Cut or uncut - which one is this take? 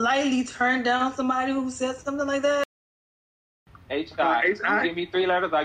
cut